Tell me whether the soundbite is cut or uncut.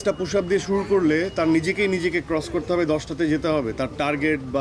uncut